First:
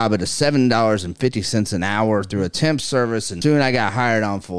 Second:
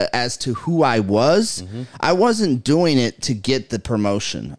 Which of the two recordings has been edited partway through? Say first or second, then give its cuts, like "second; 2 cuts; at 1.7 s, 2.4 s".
first; 1 cut; at 3.3 s